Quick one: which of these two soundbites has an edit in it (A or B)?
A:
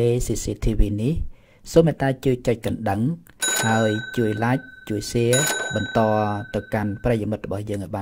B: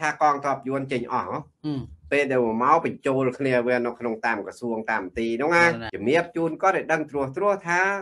B